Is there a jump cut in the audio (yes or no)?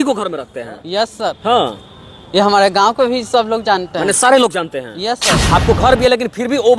yes